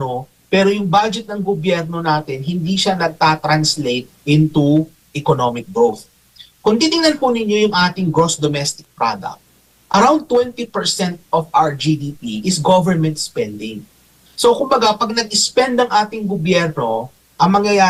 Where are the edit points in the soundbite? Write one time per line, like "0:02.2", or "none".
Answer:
none